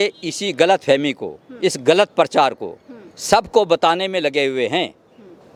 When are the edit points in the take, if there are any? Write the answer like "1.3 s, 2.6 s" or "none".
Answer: none